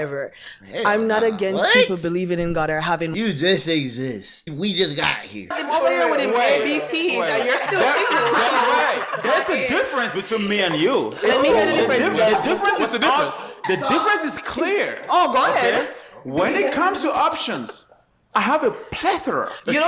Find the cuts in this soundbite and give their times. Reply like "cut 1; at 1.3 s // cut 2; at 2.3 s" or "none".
cut 1; at 4.5 s // cut 2; at 5.6 s